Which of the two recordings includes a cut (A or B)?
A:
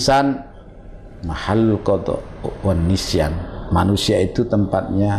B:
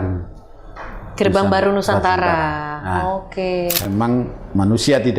B